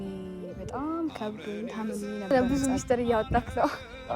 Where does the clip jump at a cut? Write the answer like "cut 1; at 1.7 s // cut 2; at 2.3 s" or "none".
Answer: cut 1; at 2.3 s